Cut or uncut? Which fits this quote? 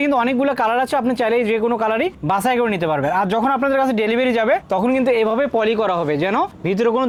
uncut